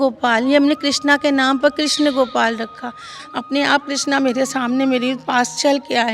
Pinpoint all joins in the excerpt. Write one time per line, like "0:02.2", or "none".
0:03.2